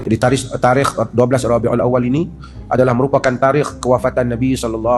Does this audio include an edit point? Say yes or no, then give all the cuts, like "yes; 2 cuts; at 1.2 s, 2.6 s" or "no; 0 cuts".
no; 0 cuts